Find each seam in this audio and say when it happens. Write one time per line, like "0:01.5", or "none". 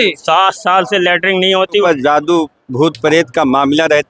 0:01.8